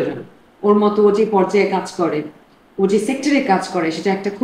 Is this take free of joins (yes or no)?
yes